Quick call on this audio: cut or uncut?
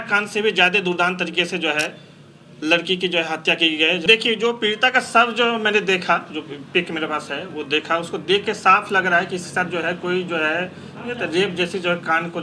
cut